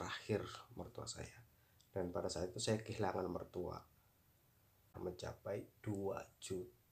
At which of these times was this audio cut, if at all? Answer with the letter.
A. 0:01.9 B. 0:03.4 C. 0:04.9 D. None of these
C